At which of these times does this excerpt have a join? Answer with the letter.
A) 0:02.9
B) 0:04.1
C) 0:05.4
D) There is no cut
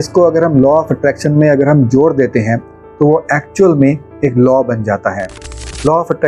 D